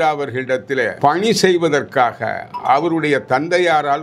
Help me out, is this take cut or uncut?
cut